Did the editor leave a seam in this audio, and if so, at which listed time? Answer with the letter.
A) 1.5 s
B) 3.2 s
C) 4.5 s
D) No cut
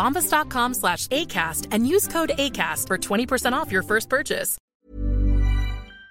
C